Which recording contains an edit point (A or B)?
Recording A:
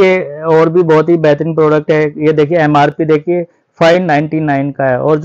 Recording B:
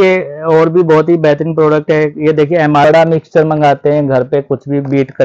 B